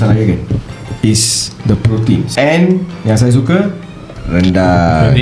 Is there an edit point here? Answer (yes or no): yes